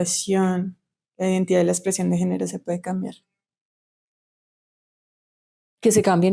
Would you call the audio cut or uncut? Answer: uncut